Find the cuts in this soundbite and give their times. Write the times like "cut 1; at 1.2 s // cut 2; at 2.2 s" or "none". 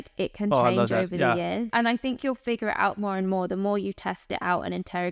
cut 1; at 1.7 s